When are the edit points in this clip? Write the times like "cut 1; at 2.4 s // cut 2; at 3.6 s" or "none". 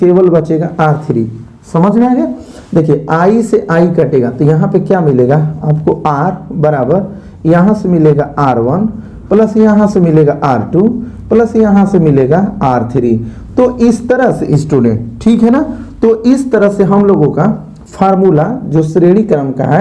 none

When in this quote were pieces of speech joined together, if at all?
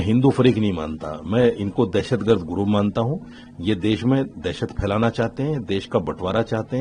none

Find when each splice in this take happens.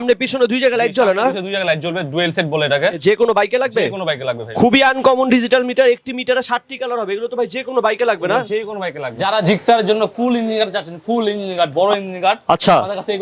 cut 1; at 3.0 s // cut 2; at 4.5 s // cut 3; at 9.1 s

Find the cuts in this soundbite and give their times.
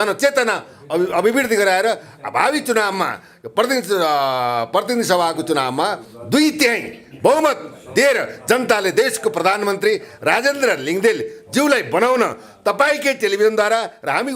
none

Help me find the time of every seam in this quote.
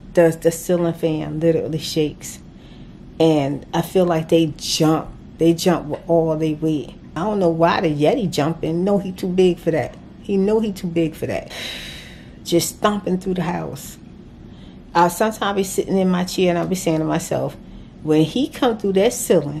none

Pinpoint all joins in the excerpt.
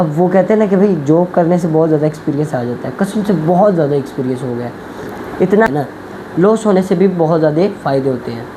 cut 1; at 5.7 s

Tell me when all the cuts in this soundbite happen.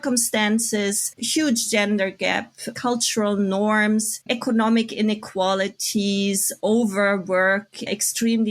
cut 1; at 2.7 s

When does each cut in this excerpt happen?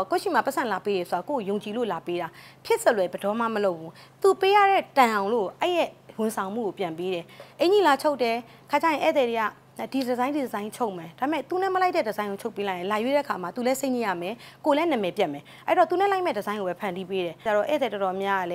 cut 1; at 17.4 s

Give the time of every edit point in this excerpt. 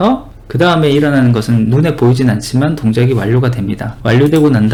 none

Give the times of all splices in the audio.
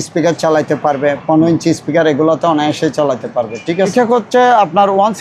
cut 1; at 3.9 s

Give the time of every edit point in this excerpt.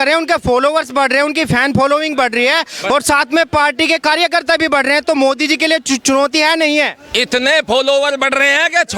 none

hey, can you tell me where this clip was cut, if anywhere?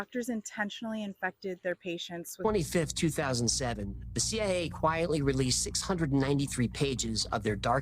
cut 1; at 2.4 s

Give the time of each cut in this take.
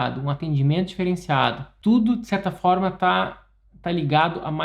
cut 1; at 1.7 s

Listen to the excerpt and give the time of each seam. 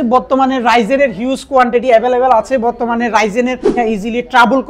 cut 1; at 3.8 s

